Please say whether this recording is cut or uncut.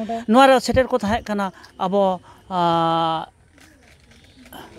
uncut